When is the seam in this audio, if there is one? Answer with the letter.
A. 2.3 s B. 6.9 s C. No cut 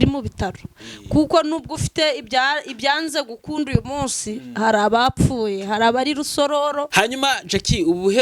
B